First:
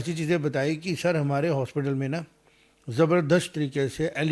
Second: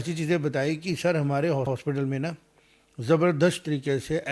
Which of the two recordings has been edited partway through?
first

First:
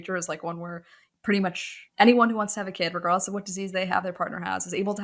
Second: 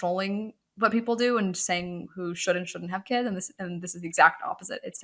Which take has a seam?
first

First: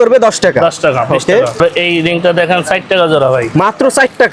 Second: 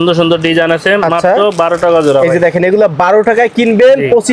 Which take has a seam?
first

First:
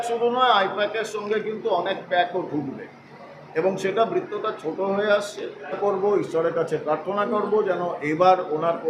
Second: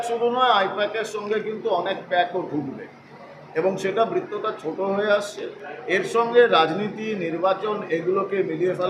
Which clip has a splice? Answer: first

